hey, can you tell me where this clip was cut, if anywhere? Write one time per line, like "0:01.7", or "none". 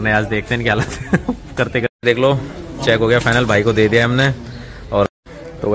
0:01.9
0:05.1